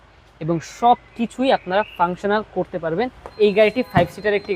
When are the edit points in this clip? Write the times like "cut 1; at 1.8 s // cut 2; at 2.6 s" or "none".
cut 1; at 3.3 s